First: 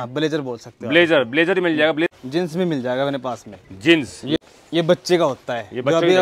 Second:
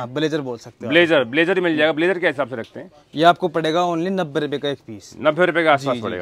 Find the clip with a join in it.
first; 2 cuts; at 2.1 s, 4.4 s

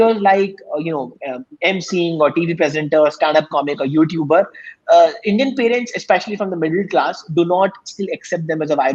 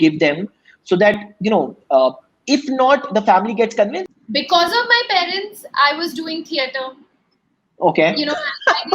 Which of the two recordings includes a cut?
second; 1 cut; at 4.0 s

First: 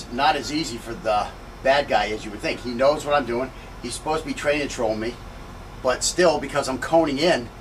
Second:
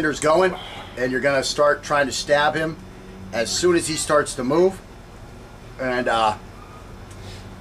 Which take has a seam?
first; 1 cut; at 2.4 s

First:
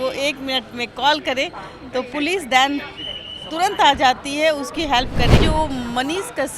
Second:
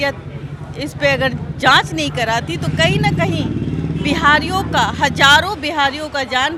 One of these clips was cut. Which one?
first; 1 cut; at 5.4 s

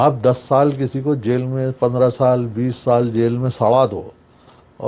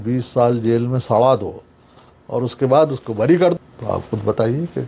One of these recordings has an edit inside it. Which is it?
second; 1 cut; at 3.6 s

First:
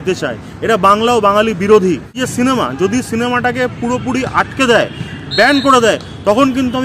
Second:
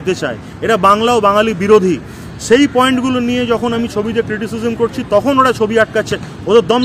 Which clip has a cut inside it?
first; 1 cut; at 2.2 s

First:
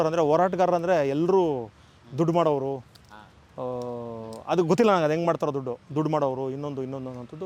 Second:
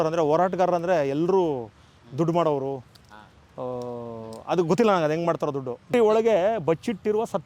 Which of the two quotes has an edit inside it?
second; 1 cut; at 5.9 s

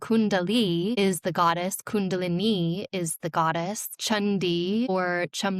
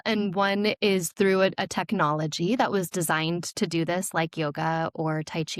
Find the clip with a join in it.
first; 3 cuts; at 0.9 s, 3.9 s, 4.9 s

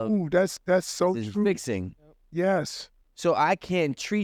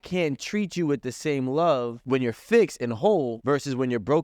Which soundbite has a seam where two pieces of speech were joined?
second; 2 cuts; at 2.0 s, 3.4 s

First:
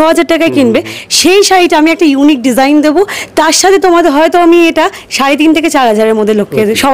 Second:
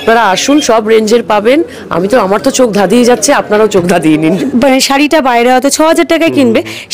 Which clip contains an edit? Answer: second; 1 cut; at 4.4 s

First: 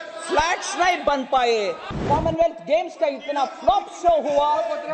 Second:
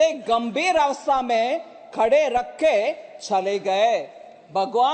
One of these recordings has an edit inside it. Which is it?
first; 1 cut; at 2.0 s

